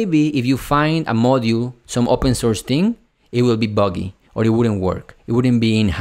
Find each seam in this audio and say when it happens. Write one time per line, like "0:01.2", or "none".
none